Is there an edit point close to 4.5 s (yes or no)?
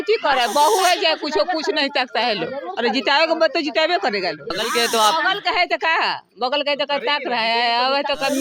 yes